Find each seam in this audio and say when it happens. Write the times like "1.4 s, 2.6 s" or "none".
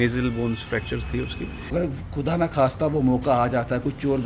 1.7 s